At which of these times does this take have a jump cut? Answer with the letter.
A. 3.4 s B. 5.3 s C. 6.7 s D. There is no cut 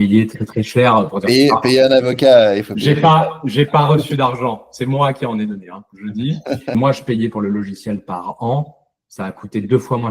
C